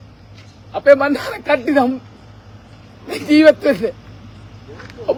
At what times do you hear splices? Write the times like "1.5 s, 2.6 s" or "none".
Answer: none